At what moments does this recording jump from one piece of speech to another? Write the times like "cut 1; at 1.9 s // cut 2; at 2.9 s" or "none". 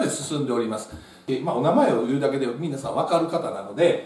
cut 1; at 1.1 s